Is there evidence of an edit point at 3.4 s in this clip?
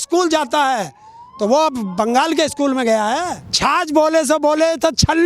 yes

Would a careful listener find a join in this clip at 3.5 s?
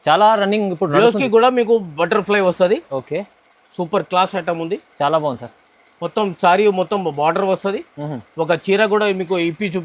no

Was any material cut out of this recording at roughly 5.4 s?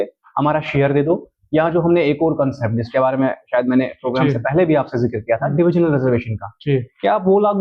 no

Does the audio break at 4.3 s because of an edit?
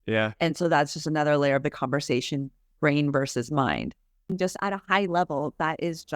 yes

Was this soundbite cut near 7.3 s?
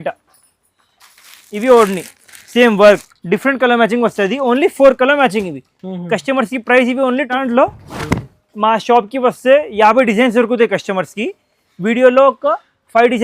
yes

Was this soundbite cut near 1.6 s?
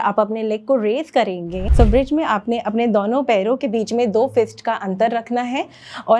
yes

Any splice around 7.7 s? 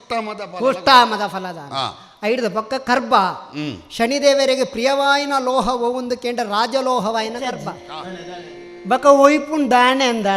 yes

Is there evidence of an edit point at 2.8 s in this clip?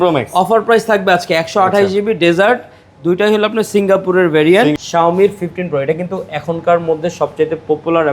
no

